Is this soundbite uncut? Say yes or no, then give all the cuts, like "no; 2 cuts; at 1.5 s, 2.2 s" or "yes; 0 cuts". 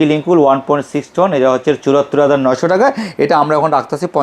yes; 0 cuts